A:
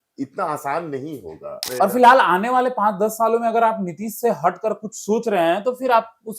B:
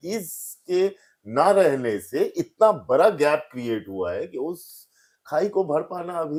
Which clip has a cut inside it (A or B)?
A